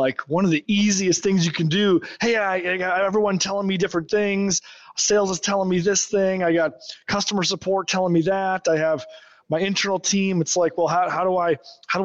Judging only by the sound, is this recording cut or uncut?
uncut